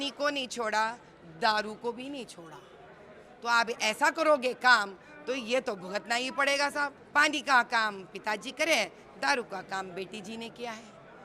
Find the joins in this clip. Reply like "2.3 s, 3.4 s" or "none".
7.0 s